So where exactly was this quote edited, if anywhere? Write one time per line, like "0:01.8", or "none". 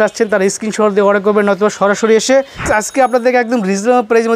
0:02.7